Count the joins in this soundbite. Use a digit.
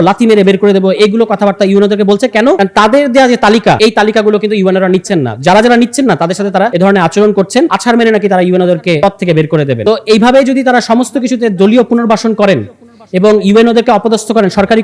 6